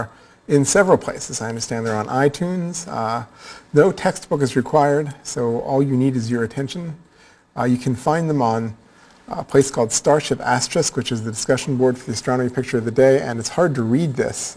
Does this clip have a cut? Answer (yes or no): no